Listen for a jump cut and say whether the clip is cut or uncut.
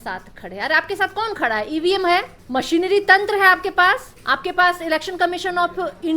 cut